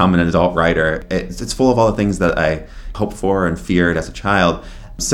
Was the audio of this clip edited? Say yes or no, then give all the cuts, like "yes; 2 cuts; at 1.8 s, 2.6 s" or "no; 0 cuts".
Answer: yes; 2 cuts; at 1.0 s, 2.9 s